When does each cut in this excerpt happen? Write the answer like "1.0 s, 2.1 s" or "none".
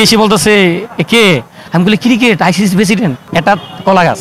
1.5 s, 3.2 s